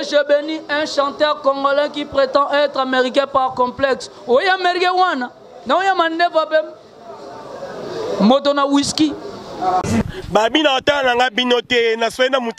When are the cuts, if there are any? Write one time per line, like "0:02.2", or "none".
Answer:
0:09.8